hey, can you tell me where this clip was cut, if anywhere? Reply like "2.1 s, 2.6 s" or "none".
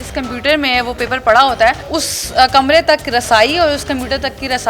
none